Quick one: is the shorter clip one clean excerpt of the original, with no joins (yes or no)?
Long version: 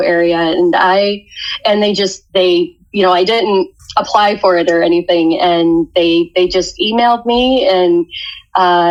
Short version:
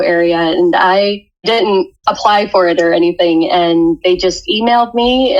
no